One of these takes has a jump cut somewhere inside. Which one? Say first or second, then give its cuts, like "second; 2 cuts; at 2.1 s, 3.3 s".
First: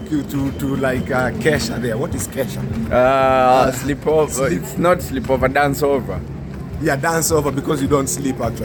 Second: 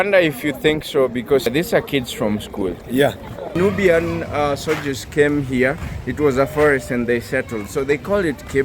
second; 1 cut; at 3.6 s